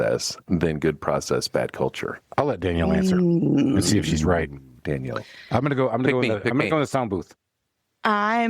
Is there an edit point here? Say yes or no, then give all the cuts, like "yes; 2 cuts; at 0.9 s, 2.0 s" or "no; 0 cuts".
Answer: yes; 1 cut; at 2.1 s